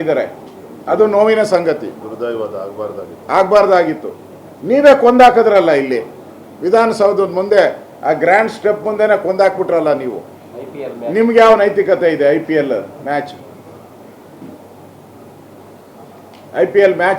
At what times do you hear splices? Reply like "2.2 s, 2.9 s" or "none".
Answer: none